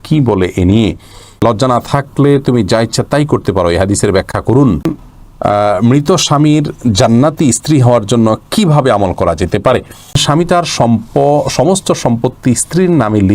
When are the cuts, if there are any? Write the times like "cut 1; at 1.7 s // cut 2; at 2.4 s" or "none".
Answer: cut 1; at 1.4 s // cut 2; at 5.0 s // cut 3; at 10.2 s